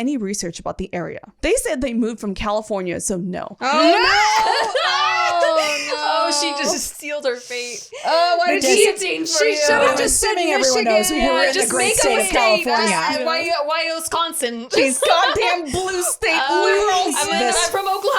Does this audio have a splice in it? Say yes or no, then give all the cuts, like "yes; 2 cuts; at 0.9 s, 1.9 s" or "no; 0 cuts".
yes; 1 cut; at 1.3 s